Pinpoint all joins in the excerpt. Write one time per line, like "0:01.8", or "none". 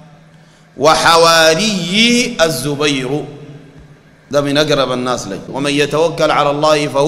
0:05.5